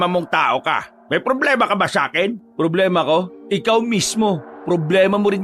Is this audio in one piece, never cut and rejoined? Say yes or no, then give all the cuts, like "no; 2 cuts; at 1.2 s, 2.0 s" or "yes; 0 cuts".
no; 4 cuts; at 0.9 s, 2.4 s, 3.4 s, 4.5 s